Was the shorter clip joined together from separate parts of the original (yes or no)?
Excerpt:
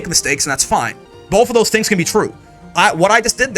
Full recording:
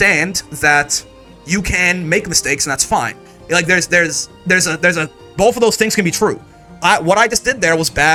yes